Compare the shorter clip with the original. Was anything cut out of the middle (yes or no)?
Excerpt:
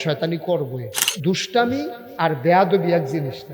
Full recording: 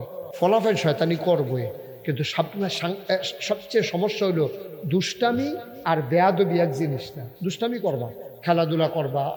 yes